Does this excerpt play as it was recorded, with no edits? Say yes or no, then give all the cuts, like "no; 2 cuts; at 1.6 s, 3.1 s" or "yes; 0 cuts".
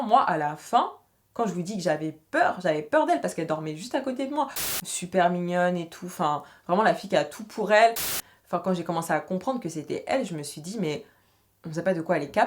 no; 2 cuts; at 4.9 s, 8.2 s